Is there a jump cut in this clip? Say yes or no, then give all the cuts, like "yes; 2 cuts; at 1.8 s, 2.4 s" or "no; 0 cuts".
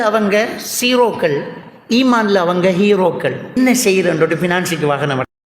yes; 1 cut; at 3.6 s